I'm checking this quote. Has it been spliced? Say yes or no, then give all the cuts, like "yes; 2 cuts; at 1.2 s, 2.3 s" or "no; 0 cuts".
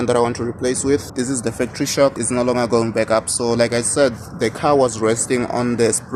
yes; 2 cuts; at 1.1 s, 2.2 s